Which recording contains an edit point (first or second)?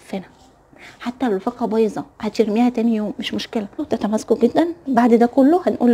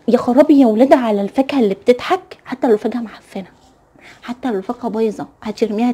first